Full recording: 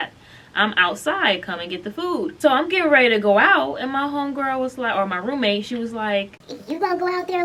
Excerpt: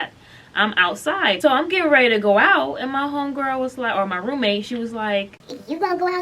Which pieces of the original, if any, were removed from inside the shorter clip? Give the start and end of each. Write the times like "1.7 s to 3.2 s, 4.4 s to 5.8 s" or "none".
1.4 s to 2.4 s